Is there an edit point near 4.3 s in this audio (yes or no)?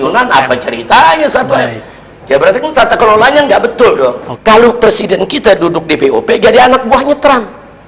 yes